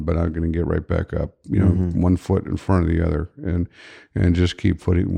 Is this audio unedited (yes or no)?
yes